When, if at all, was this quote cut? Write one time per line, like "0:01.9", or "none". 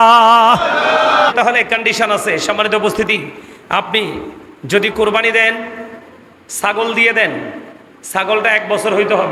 0:01.3